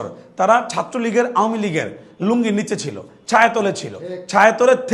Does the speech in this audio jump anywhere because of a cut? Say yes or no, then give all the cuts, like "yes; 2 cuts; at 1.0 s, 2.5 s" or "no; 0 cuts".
no; 0 cuts